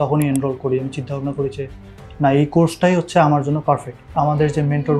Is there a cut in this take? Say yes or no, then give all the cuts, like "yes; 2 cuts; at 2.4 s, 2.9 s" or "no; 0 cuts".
yes; 1 cut; at 4.1 s